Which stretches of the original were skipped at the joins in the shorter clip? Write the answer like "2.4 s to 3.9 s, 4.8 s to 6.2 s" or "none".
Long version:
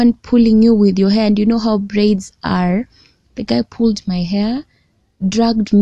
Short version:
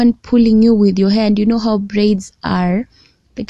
none